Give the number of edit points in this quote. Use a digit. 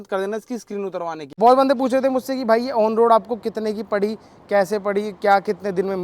1